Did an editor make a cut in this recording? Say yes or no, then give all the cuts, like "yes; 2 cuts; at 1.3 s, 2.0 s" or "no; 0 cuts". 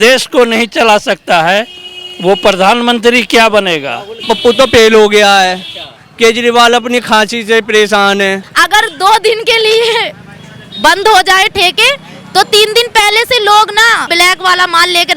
yes; 3 cuts; at 4.2 s, 8.4 s, 14.1 s